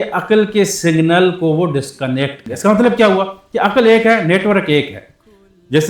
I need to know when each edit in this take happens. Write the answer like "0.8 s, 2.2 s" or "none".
2.4 s